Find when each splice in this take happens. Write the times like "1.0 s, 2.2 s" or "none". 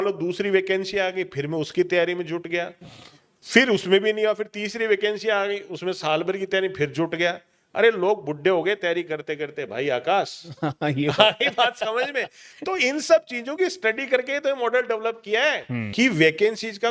15.9 s